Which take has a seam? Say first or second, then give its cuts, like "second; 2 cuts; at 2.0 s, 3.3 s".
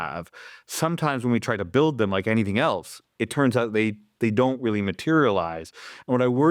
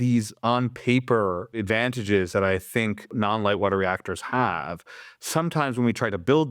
second; 2 cuts; at 1.6 s, 3.1 s